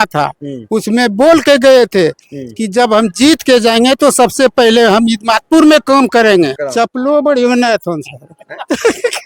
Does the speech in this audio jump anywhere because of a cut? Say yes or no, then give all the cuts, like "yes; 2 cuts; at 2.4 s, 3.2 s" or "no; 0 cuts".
yes; 1 cut; at 6.6 s